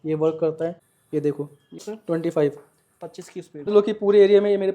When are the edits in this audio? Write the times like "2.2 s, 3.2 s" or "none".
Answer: 0.9 s, 1.8 s, 3.7 s